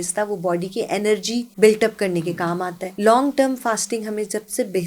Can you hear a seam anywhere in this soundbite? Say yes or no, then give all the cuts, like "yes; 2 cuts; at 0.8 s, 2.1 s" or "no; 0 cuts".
yes; 2 cuts; at 1.5 s, 2.8 s